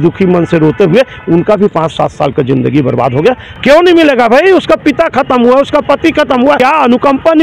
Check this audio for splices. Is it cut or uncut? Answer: cut